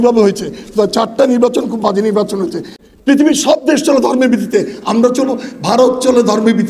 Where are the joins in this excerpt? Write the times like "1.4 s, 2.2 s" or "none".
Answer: 2.7 s